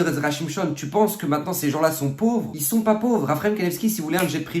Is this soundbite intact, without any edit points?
no; 1 cut; at 2.6 s

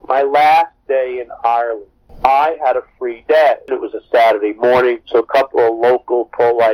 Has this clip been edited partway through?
yes; 2 cuts; at 3.7 s, 5.0 s

